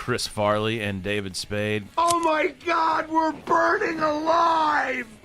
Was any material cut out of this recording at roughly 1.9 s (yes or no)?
yes